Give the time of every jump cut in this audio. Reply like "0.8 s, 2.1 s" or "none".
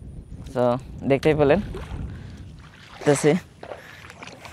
3.0 s